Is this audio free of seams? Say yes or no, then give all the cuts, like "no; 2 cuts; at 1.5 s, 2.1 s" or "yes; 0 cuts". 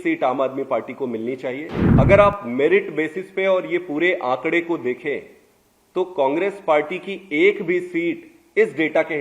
no; 1 cut; at 1.8 s